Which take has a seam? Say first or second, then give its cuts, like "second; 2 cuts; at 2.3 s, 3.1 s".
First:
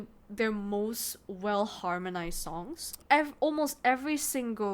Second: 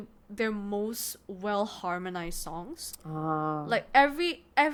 first; 1 cut; at 3.0 s